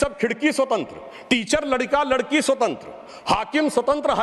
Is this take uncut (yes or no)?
yes